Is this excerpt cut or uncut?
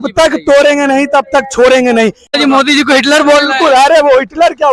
cut